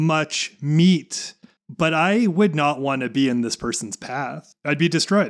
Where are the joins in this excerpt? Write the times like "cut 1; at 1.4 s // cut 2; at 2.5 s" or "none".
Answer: none